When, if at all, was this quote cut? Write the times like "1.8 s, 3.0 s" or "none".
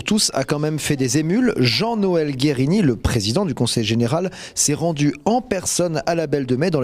4.9 s